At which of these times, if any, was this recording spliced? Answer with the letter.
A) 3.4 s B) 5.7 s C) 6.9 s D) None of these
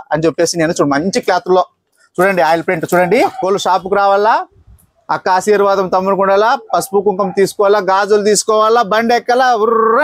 A